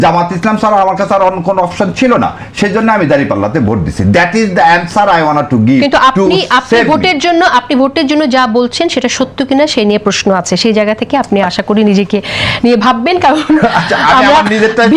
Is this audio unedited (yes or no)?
yes